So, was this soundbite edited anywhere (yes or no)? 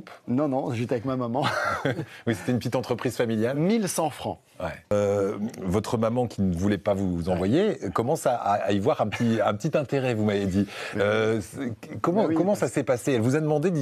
yes